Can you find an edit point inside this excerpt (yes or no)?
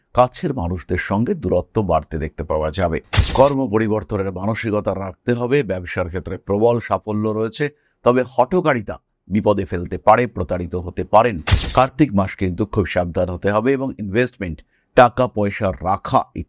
yes